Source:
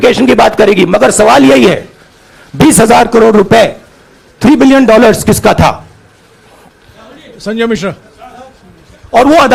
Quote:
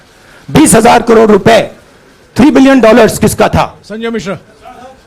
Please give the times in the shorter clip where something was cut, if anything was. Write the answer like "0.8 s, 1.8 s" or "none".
3.8 s